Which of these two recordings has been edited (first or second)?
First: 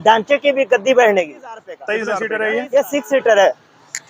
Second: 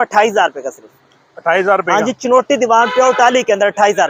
first